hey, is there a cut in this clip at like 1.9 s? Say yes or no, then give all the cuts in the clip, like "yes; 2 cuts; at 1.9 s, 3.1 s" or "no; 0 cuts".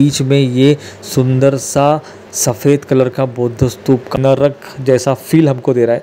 no; 1 cut; at 4.1 s